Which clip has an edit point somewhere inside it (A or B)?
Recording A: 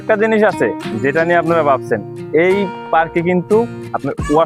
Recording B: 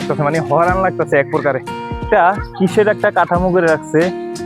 B